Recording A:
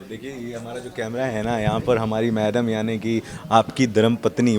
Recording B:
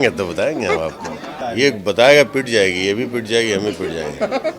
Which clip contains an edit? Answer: B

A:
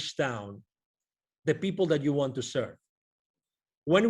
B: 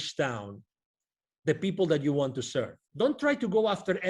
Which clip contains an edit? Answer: B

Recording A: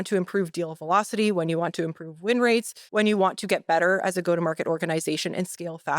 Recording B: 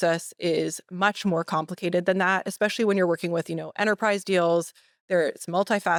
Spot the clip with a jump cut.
A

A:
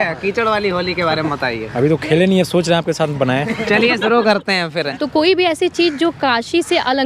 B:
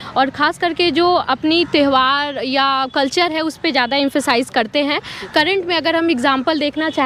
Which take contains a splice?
A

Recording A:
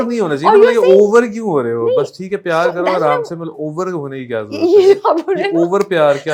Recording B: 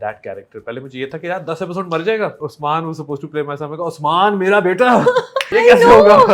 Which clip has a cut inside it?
B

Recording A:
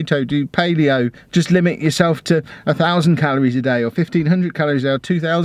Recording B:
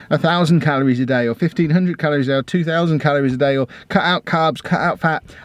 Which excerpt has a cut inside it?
A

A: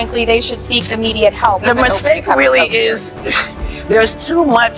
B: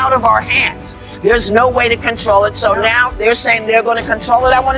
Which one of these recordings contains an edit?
A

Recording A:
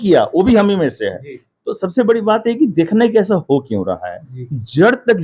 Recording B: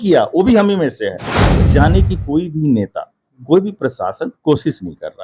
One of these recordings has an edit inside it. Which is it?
B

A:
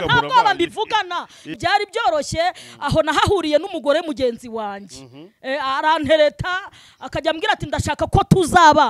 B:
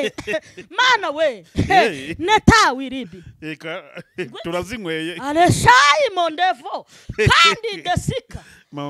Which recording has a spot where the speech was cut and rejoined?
A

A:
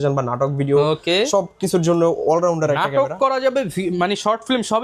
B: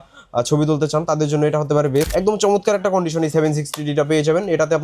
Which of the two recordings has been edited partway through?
B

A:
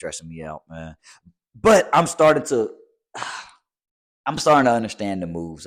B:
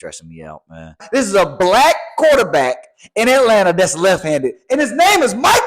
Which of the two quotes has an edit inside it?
B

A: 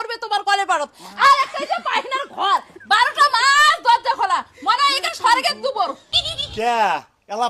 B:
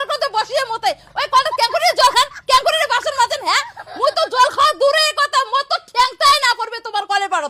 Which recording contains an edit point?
A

